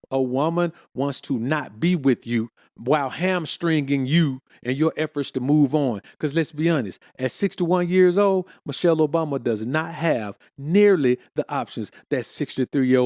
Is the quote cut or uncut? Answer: uncut